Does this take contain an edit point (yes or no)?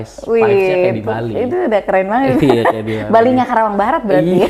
no